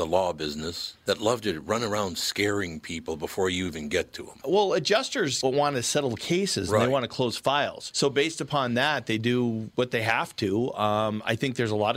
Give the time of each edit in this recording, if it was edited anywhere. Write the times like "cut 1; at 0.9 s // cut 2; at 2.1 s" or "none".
none